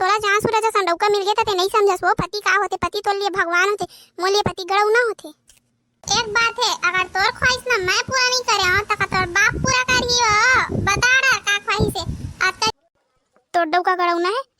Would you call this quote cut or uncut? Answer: cut